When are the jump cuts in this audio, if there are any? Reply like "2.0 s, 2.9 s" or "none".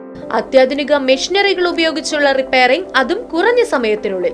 none